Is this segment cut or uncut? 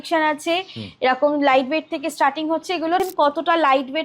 cut